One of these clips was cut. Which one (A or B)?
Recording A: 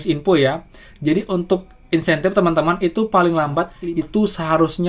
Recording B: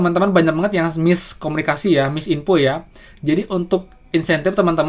A